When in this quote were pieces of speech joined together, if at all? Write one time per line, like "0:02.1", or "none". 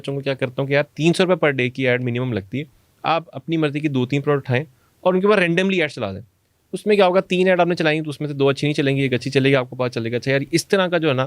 none